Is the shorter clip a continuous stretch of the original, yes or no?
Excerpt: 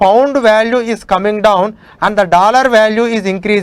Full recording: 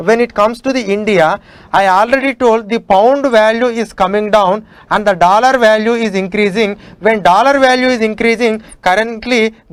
yes